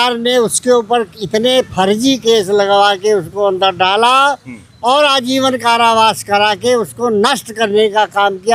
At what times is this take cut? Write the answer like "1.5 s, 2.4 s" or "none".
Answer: none